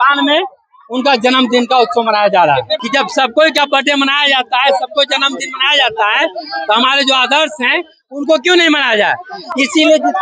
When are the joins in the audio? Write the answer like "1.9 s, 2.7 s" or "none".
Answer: 2.7 s